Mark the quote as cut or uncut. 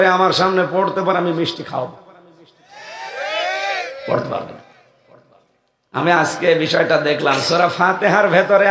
uncut